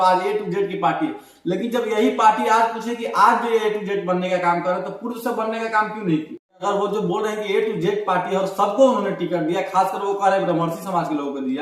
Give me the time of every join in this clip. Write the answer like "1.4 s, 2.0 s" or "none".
6.6 s